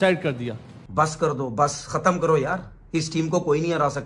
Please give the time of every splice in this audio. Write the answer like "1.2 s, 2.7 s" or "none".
0.9 s